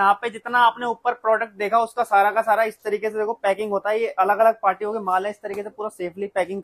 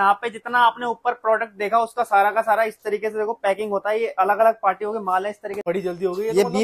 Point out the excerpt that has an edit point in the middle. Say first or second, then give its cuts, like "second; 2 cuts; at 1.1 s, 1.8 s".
second; 1 cut; at 5.5 s